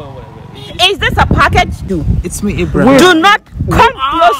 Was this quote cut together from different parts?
yes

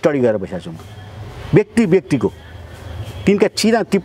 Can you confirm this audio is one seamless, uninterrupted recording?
yes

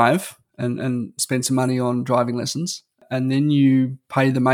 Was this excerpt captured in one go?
no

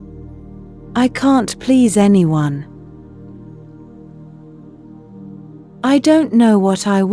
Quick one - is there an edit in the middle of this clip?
yes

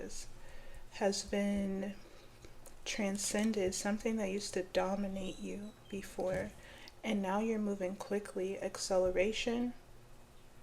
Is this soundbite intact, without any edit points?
yes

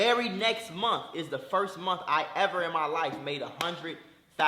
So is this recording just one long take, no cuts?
yes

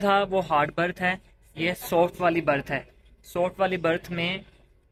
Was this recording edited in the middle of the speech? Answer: no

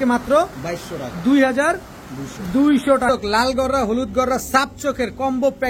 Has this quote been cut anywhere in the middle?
yes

